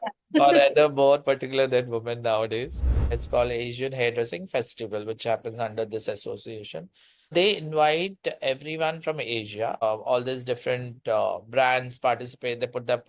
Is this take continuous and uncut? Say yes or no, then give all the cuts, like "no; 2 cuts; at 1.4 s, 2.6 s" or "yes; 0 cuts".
no; 3 cuts; at 3.0 s, 7.3 s, 9.8 s